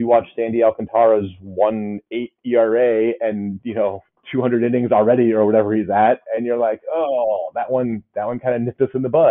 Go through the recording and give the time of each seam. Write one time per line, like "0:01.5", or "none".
none